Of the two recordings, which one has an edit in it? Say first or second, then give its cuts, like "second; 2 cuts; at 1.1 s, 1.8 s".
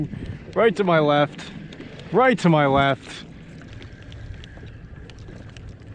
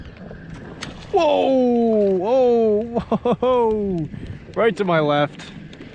first; 1 cut; at 3.7 s